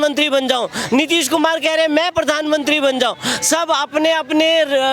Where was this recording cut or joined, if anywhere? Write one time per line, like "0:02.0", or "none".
none